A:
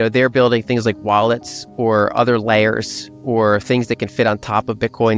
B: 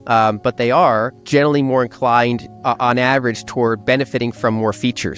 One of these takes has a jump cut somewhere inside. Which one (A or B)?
B